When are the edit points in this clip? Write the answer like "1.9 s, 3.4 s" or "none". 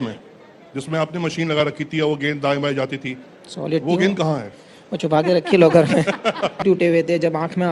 6.6 s